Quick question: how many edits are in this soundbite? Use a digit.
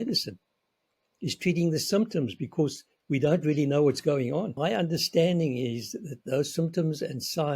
1